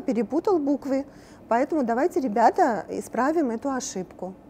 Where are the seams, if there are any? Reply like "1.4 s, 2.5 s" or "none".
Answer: none